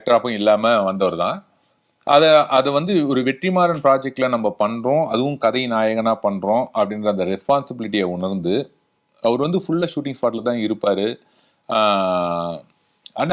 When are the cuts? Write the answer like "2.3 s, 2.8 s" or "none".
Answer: none